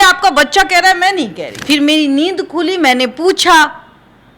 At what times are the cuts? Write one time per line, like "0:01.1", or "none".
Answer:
0:01.5